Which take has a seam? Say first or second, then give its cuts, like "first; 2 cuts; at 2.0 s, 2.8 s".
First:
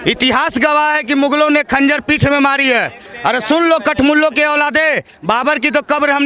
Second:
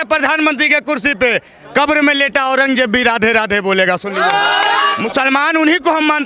second; 1 cut; at 5.0 s